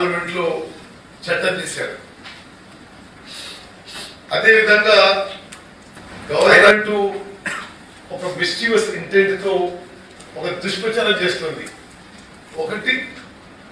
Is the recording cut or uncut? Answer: uncut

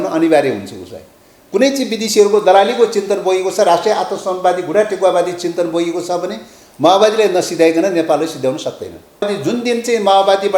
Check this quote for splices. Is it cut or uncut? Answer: cut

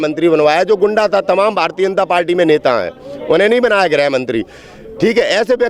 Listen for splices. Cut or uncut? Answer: uncut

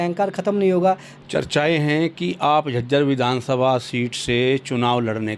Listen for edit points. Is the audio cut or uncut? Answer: cut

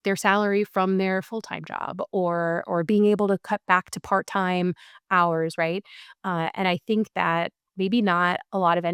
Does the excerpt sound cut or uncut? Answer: uncut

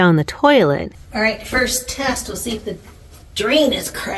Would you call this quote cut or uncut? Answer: cut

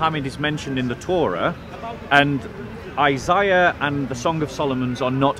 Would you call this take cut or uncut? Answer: uncut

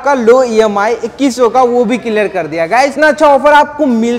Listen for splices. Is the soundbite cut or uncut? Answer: cut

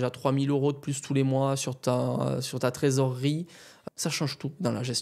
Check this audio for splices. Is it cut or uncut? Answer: cut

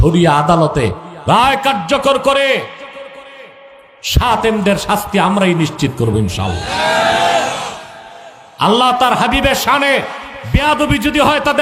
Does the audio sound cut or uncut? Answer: uncut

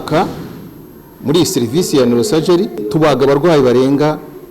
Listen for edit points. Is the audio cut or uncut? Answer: cut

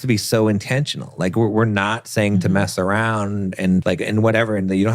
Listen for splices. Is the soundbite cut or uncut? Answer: cut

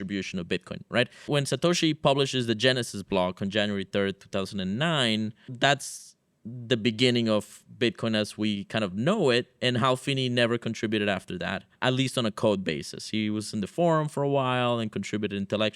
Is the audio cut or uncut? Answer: cut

